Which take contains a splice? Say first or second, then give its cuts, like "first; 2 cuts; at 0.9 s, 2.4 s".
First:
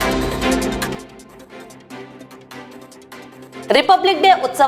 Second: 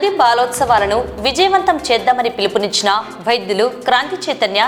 first; 1 cut; at 3.6 s